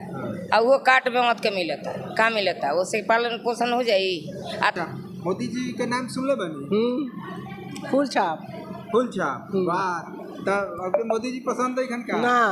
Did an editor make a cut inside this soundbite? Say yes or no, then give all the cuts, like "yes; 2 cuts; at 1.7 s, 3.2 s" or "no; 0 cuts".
yes; 1 cut; at 4.7 s